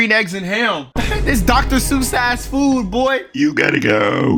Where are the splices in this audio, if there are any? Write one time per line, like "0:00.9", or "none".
none